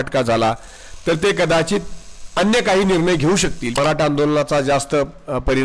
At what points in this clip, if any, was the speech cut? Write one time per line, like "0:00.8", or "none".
0:03.8